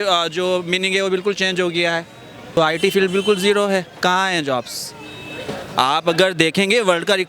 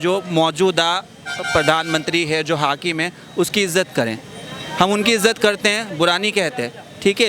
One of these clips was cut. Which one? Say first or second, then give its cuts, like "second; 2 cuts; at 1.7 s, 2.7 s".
first; 1 cut; at 2.6 s